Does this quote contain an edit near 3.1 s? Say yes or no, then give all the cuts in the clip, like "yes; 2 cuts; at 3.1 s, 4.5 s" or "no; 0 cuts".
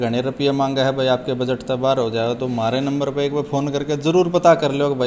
no; 0 cuts